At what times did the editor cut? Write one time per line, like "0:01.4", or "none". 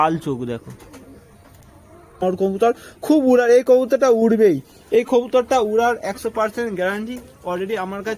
0:02.2